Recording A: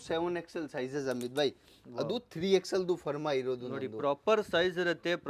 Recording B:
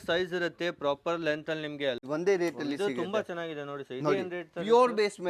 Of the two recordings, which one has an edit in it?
B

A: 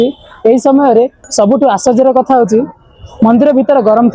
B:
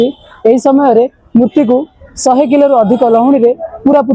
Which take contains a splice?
A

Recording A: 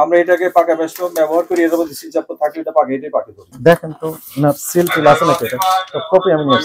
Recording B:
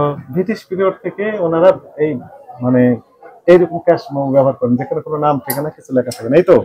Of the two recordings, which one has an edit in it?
A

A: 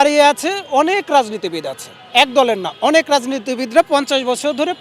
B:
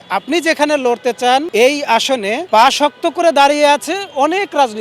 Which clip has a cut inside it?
B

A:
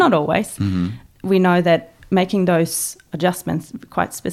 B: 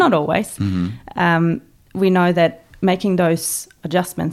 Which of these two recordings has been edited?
A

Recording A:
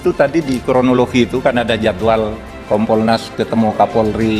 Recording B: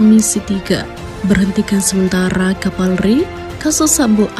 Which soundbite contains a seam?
A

